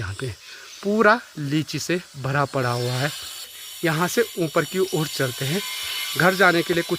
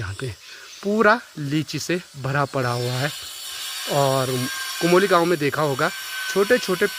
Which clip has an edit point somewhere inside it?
first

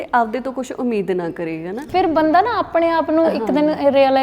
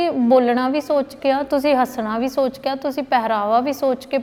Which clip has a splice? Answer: first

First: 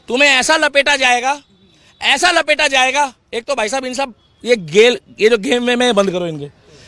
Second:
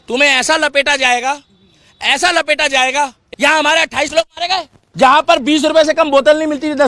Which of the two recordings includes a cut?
second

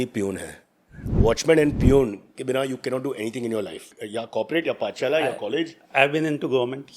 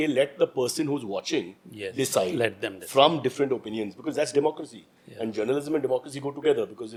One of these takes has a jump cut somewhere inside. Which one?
first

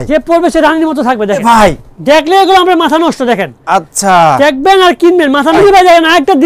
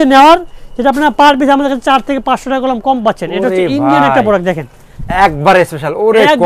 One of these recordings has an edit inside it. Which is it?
first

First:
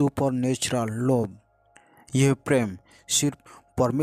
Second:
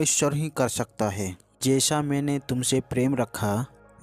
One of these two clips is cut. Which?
second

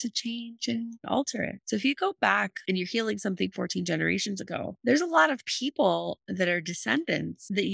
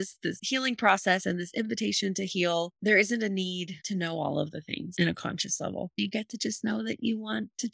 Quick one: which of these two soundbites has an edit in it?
first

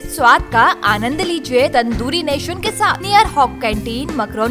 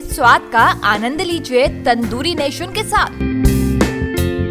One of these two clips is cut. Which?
first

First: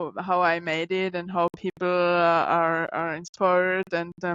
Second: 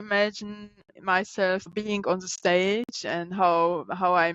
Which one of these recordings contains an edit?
second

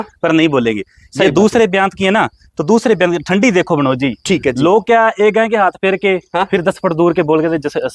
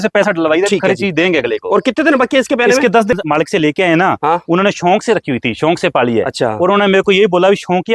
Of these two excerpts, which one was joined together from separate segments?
second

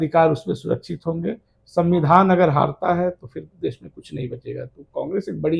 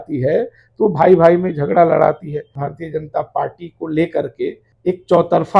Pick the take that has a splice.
second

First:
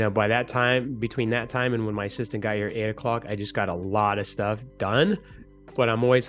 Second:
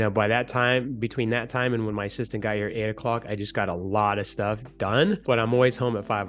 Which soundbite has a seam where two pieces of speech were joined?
second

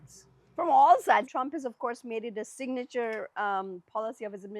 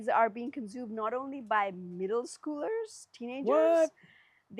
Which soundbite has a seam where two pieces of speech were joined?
first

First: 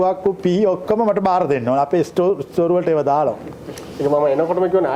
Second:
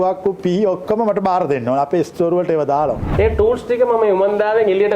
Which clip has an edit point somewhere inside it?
second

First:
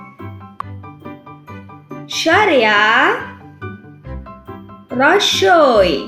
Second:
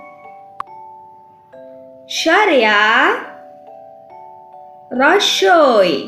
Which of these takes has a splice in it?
second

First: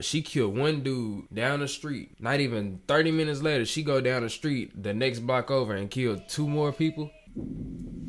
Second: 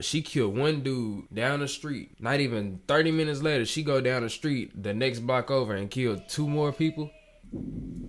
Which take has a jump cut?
first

